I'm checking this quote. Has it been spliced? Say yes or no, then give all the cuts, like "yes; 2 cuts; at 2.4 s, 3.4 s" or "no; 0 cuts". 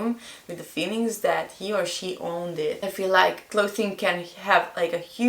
yes; 1 cut; at 2.9 s